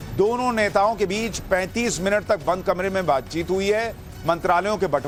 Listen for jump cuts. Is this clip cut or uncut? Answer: uncut